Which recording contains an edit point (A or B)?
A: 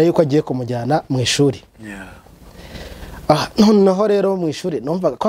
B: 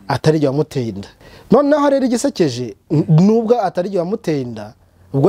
B